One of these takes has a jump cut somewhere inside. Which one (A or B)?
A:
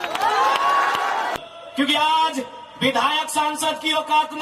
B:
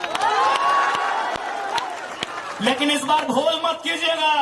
A